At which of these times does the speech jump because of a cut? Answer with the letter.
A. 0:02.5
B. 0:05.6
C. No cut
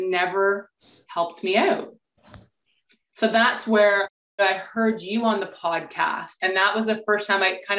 C